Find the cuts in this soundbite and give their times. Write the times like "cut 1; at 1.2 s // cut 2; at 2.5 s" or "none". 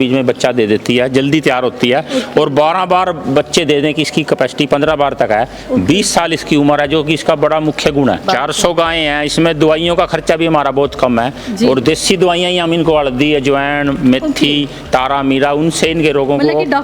cut 1; at 8.2 s